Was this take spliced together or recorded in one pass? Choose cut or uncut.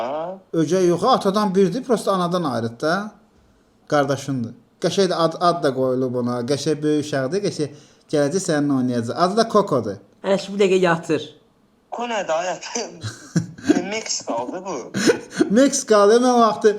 cut